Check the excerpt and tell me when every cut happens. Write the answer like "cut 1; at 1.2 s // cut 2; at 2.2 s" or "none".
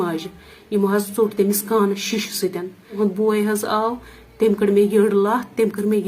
cut 1; at 2.8 s